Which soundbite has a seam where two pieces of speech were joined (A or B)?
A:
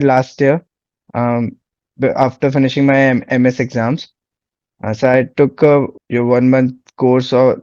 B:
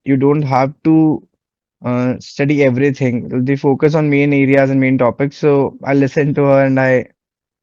A